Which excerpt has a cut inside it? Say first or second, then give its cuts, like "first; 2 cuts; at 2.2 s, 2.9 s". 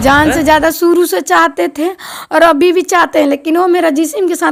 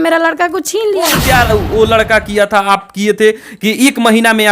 second; 1 cut; at 1.2 s